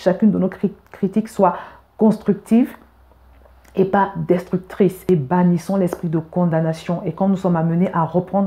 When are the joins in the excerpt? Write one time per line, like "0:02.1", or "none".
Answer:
0:05.1